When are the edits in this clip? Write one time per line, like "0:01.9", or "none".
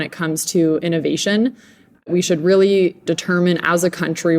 0:02.1
0:03.0